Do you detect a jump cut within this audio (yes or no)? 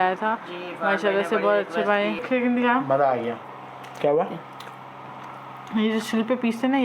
yes